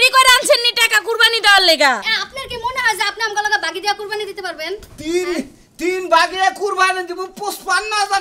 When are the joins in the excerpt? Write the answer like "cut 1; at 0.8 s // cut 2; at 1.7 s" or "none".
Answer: cut 1; at 2.0 s